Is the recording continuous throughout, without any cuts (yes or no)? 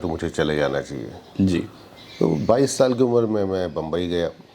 yes